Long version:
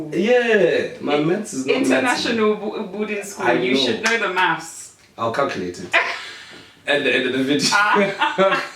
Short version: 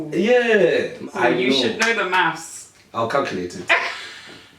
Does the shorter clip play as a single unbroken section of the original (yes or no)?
no